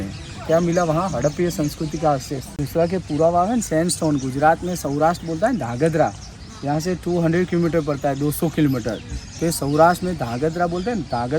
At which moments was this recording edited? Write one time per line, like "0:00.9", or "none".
none